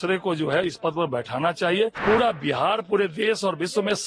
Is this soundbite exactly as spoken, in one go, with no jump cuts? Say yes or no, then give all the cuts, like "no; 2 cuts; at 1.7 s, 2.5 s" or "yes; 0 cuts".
no; 1 cut; at 2.0 s